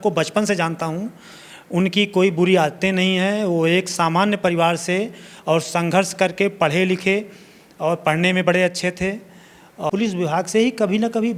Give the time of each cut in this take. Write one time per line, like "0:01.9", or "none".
0:09.8